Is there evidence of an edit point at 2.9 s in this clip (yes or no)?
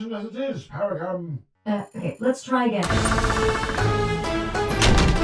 yes